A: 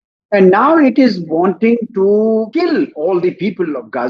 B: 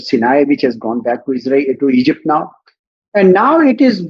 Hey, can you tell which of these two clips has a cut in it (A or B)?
A